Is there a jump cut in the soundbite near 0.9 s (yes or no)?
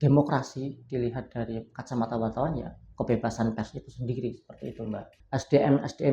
no